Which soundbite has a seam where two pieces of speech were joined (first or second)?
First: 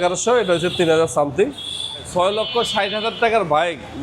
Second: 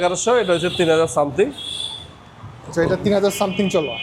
first